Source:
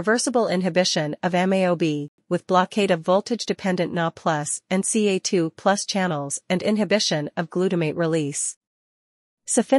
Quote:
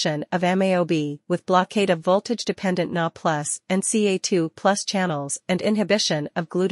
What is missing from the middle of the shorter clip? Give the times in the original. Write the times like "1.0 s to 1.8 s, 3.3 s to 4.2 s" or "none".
2.1 s to 2.2 s